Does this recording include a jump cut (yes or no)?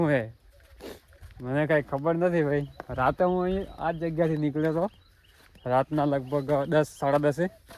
no